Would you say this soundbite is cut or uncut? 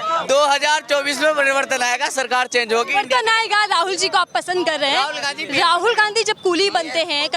uncut